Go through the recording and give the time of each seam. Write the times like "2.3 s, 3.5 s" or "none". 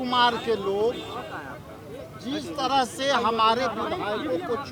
none